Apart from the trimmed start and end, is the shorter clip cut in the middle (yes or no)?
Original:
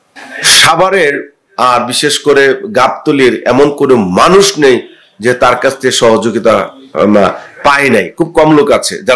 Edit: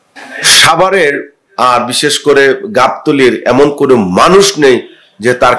no